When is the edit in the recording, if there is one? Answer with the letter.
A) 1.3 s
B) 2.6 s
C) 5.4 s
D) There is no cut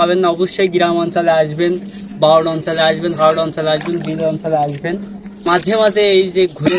C